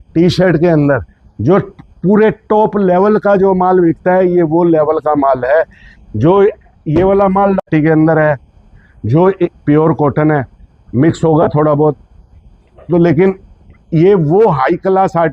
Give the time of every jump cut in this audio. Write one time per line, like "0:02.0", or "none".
0:07.6